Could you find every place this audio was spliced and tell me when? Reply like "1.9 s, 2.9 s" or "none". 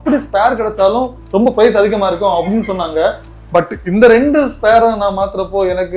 none